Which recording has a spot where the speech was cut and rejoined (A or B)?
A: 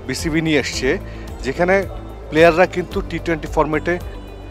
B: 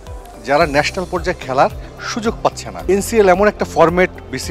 B